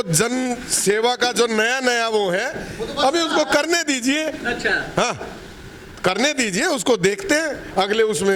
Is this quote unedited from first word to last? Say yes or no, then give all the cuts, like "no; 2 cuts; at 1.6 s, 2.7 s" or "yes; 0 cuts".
yes; 0 cuts